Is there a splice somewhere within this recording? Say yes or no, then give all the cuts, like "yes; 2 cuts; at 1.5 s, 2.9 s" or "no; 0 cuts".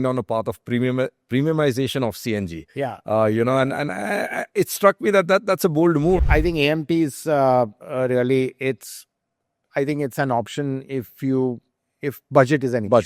yes; 1 cut; at 6.2 s